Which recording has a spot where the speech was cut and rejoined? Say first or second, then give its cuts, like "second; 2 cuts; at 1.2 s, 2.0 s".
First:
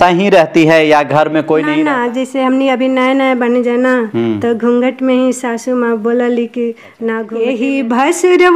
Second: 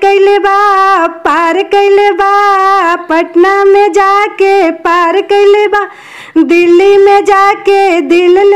first; 2 cuts; at 1.8 s, 7.3 s